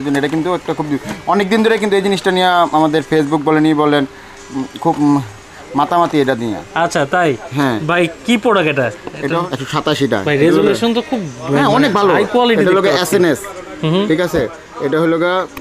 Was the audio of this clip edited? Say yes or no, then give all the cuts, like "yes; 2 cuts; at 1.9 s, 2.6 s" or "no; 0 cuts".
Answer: yes; 1 cut; at 9.4 s